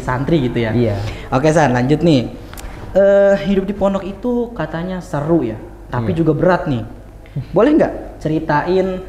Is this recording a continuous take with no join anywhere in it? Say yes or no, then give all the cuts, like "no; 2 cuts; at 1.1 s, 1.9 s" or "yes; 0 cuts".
yes; 0 cuts